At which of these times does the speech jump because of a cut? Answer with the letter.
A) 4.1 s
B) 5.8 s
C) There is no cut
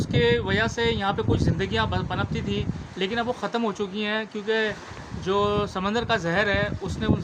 C